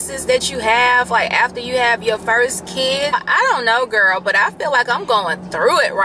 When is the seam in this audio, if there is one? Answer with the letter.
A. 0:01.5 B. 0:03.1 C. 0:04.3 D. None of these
B